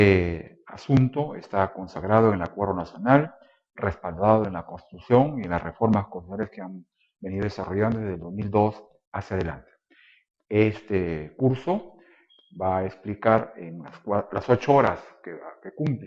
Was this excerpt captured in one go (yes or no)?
yes